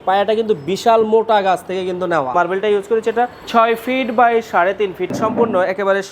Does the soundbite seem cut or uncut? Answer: cut